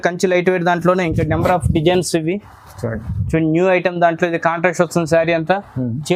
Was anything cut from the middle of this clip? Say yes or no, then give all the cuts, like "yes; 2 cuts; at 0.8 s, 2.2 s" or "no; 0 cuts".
no; 0 cuts